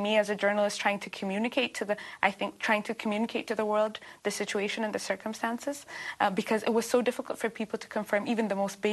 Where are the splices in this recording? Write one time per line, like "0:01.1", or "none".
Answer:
none